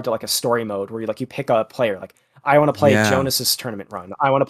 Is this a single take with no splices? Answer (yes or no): yes